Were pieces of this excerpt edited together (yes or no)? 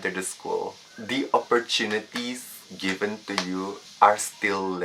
yes